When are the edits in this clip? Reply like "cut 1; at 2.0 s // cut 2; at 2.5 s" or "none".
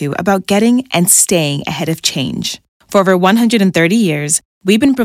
none